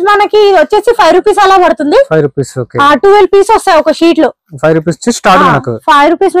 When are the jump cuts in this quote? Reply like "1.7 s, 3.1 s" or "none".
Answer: none